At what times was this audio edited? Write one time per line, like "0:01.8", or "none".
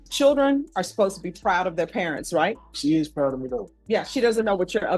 0:02.7
0:03.7